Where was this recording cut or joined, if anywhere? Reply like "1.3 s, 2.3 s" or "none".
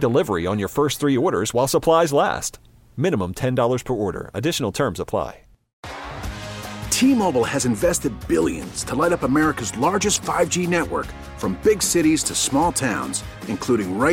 5.7 s